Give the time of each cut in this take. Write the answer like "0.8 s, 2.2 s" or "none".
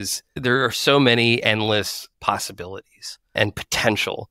3.4 s